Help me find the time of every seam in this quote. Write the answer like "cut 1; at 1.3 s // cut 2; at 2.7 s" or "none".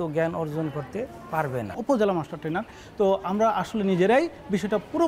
cut 1; at 1.8 s